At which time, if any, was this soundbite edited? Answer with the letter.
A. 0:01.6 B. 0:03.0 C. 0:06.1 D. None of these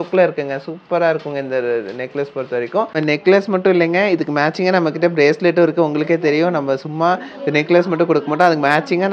B